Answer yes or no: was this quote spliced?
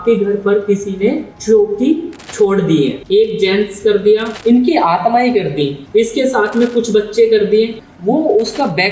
yes